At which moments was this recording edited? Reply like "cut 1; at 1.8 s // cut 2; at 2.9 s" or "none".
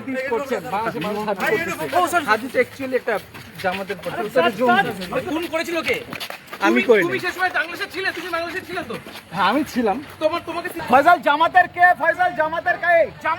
cut 1; at 10.8 s